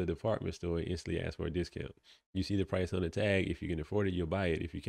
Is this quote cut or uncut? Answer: uncut